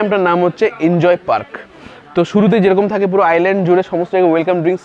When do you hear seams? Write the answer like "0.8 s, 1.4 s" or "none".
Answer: none